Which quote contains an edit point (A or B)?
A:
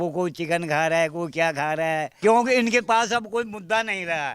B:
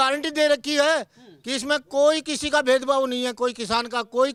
A